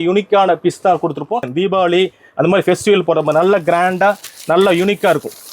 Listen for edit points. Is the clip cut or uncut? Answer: cut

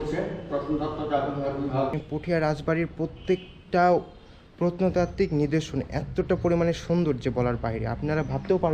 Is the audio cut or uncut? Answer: cut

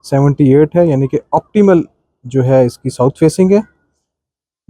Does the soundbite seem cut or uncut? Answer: uncut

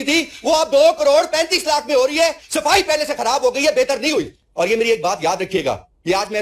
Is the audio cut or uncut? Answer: cut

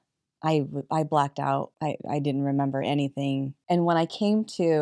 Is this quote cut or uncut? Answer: cut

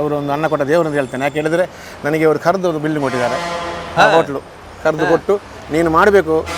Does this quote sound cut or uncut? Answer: uncut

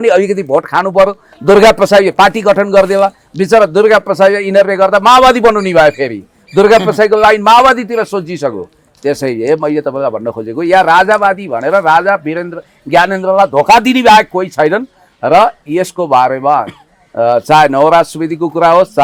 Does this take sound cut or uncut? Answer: uncut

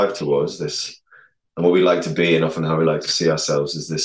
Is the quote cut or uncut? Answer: uncut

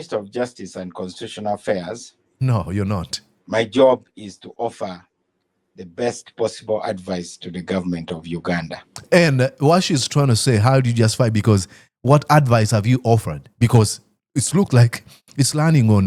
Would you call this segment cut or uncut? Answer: uncut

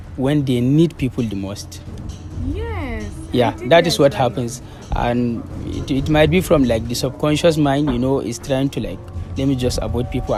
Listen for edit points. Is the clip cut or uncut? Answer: uncut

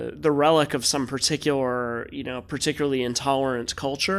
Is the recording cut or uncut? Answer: uncut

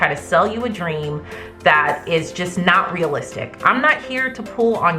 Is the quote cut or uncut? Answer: uncut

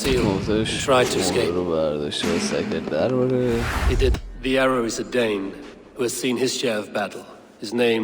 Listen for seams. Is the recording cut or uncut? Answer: cut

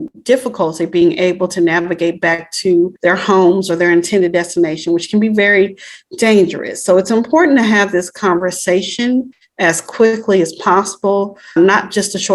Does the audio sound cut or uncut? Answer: cut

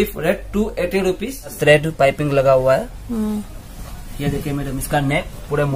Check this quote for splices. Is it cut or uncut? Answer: cut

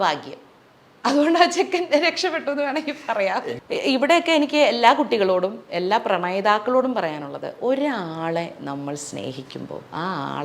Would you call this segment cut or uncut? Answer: cut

